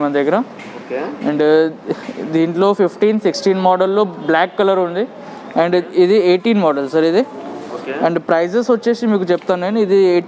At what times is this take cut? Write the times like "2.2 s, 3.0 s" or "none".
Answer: none